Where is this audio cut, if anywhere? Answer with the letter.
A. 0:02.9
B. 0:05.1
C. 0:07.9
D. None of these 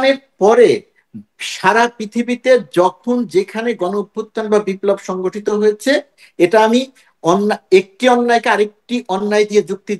D